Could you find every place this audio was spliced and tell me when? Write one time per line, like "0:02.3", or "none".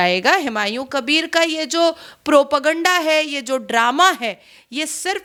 none

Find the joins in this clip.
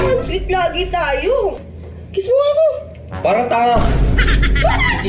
0:01.6

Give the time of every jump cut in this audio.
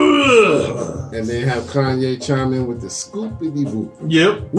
none

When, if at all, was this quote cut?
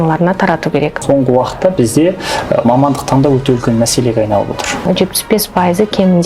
0:01.0
0:04.8

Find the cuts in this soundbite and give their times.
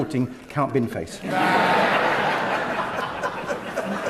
none

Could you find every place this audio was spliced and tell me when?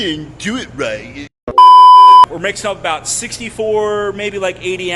0:01.3
0:02.3

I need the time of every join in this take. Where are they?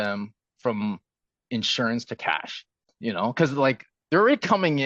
0:02.9

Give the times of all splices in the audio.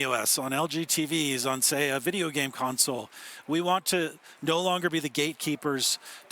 none

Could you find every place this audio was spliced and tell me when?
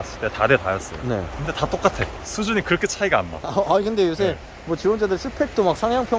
0:01.3
0:02.2

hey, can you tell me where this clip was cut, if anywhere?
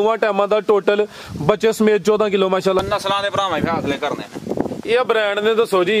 0:02.8

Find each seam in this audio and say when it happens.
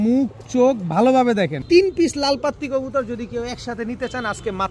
0:01.6

